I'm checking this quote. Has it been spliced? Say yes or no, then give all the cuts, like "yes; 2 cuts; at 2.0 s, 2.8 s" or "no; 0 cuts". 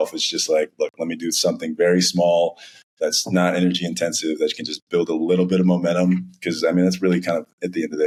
no; 0 cuts